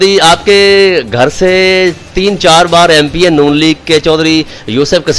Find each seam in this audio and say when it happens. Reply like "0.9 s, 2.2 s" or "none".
none

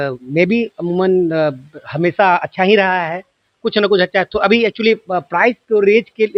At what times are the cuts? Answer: none

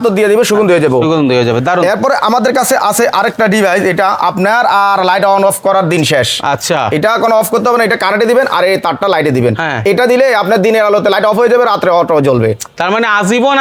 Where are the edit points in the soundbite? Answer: none

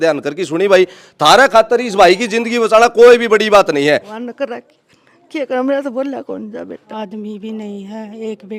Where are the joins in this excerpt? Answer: 4.2 s, 6.9 s

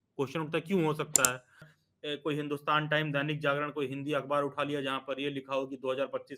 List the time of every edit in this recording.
1.7 s

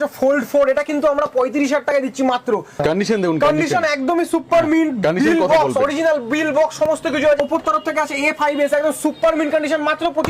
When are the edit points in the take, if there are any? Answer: 2.8 s, 7.4 s

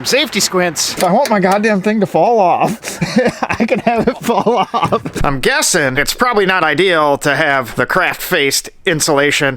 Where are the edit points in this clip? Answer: 1.0 s, 5.1 s

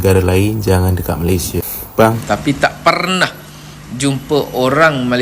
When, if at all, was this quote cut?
2.2 s

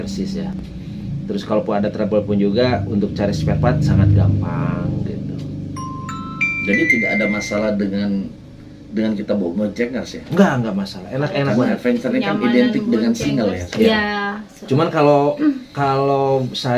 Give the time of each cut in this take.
none

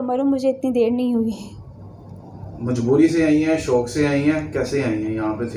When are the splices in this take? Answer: none

